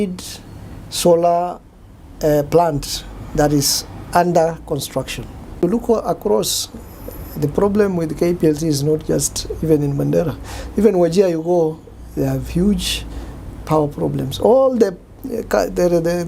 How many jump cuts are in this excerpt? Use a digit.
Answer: 1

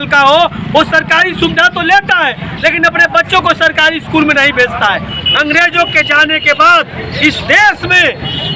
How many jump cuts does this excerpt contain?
1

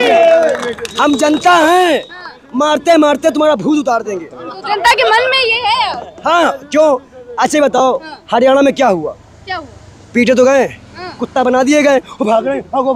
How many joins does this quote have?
0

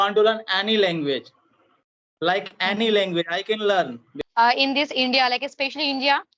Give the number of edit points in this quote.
1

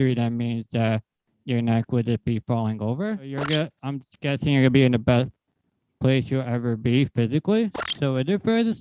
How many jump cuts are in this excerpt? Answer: 2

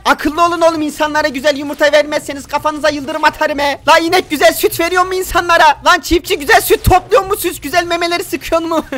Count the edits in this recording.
0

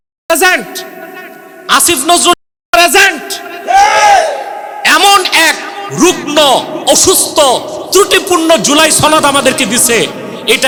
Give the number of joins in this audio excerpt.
0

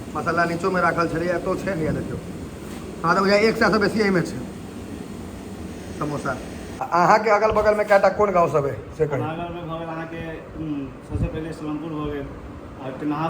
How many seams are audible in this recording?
1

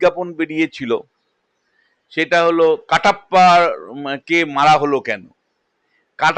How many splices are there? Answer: 0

